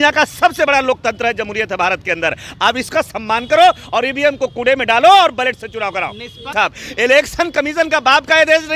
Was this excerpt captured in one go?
no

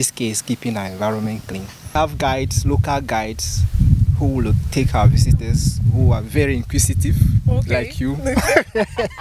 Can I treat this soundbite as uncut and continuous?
no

